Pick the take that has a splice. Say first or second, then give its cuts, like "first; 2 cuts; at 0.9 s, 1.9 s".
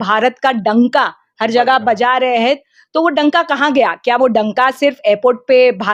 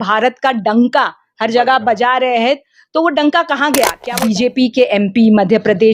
second; 1 cut; at 4.0 s